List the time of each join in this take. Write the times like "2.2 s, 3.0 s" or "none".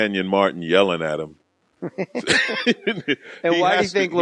none